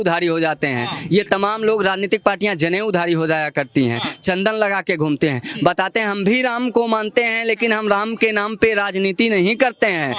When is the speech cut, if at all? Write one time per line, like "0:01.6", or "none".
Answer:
none